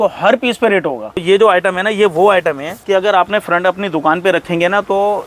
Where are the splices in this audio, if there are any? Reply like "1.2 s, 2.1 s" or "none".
1.2 s, 2.7 s